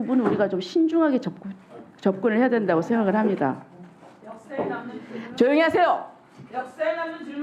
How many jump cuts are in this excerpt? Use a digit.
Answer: 0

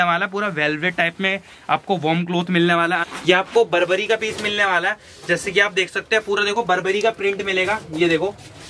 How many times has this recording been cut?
1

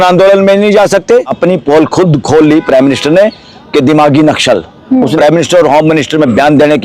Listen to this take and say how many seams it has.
2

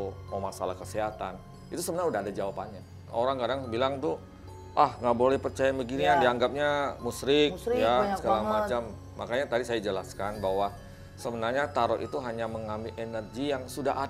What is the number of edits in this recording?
1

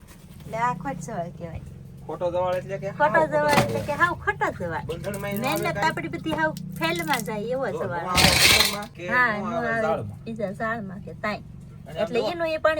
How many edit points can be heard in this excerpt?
0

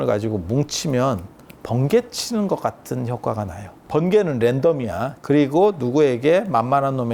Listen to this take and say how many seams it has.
2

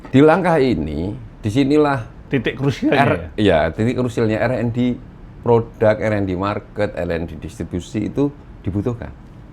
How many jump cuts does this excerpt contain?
1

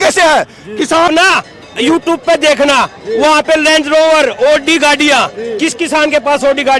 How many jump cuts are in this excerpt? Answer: 1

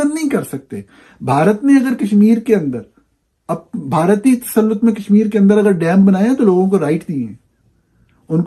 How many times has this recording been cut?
0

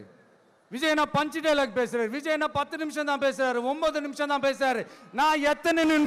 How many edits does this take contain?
0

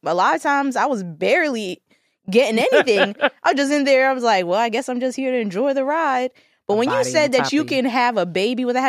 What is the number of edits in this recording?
0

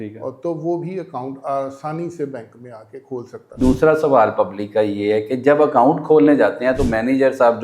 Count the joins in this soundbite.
1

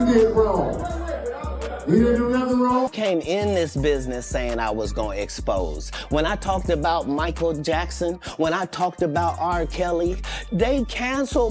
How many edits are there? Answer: 1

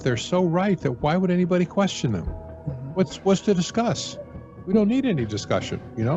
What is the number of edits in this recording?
0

